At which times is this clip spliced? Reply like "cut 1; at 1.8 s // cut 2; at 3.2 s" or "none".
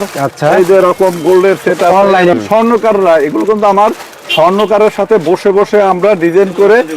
cut 1; at 2.3 s